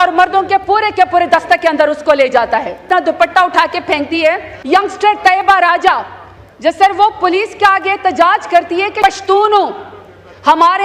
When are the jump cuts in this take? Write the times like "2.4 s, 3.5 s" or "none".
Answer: 2.8 s, 4.5 s, 9.0 s